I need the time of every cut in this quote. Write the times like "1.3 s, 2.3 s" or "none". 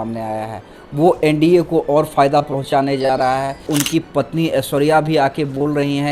3.7 s